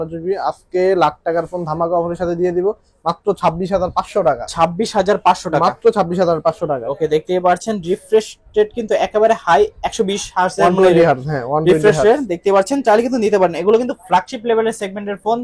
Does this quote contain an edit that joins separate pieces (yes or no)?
no